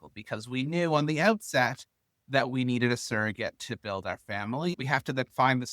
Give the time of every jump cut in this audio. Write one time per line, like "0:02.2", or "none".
0:04.8